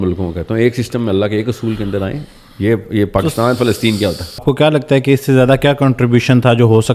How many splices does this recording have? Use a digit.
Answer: 1